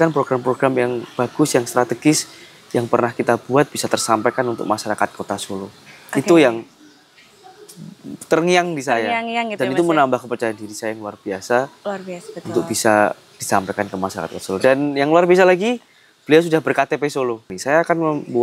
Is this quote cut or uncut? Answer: cut